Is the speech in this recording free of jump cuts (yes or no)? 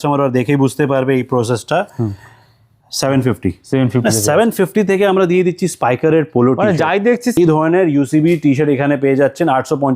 no